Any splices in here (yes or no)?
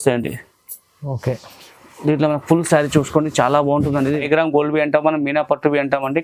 yes